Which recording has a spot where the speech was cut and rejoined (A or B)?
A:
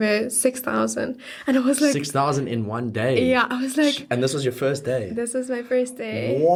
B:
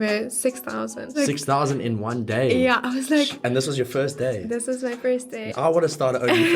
B